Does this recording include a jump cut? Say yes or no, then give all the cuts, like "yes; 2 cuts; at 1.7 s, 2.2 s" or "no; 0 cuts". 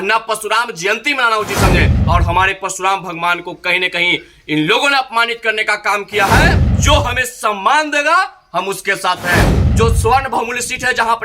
yes; 3 cuts; at 2.0 s, 6.7 s, 9.6 s